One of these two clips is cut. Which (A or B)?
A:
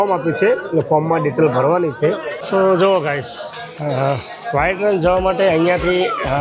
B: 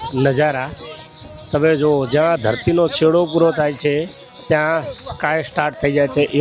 A